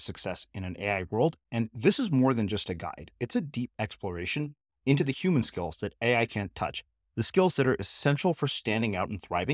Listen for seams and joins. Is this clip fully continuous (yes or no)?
yes